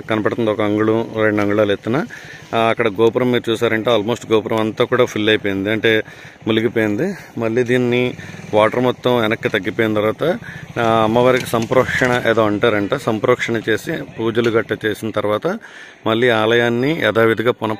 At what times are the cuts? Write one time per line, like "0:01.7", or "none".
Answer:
none